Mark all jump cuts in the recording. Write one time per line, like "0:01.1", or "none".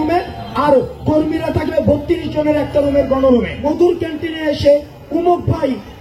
0:03.6

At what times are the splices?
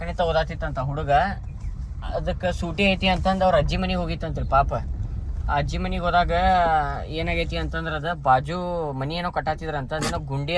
none

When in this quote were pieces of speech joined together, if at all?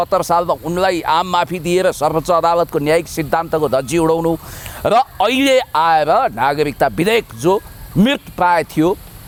none

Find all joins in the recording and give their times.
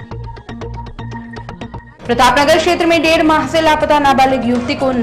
0:01.7

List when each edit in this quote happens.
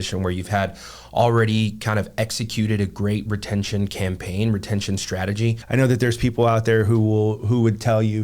0:05.6

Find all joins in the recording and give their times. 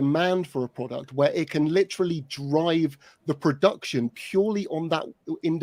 none

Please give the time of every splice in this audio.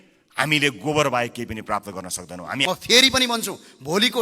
0:02.6

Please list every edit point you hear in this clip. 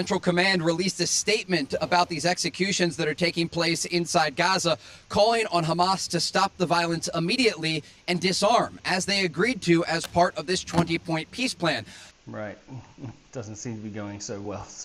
none

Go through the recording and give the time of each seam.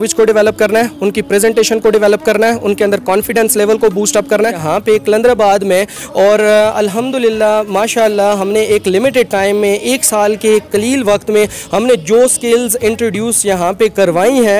0:04.6

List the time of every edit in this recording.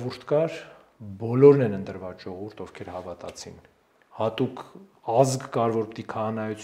none

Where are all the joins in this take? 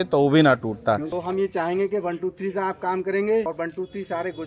0:01.1
0:03.5

